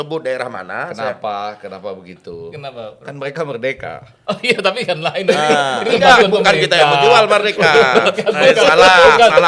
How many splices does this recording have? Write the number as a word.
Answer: zero